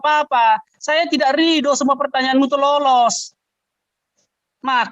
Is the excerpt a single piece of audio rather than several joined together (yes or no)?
yes